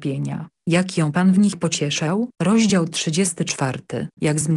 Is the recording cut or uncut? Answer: cut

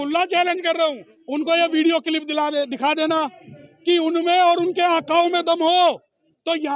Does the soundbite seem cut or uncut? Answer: cut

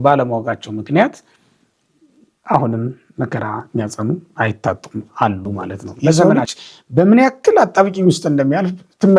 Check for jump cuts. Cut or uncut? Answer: cut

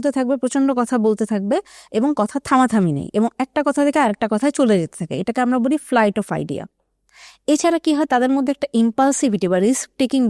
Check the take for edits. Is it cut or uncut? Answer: uncut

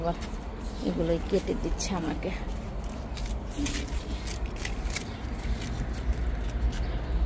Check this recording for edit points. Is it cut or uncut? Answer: uncut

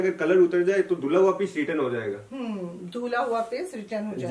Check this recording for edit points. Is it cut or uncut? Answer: uncut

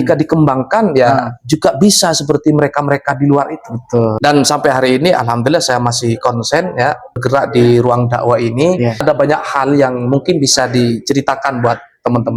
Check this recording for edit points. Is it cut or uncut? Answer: cut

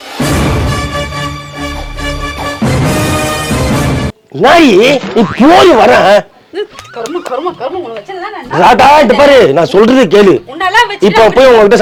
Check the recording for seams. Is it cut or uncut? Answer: uncut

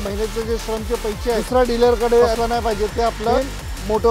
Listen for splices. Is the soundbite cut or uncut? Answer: cut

